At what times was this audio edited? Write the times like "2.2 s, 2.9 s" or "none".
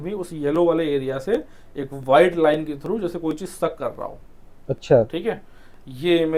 none